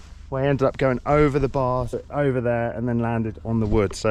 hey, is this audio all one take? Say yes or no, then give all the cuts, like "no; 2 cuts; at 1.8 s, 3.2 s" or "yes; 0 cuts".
yes; 0 cuts